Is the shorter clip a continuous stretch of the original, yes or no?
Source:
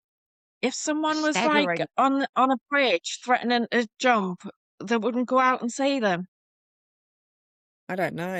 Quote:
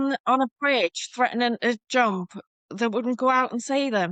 yes